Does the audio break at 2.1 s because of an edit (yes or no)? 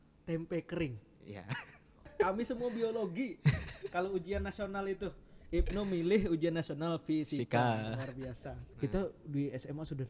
yes